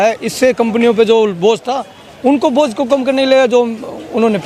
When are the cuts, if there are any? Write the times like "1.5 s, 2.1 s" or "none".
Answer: none